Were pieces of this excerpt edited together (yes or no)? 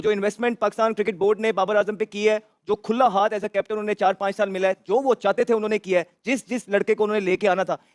no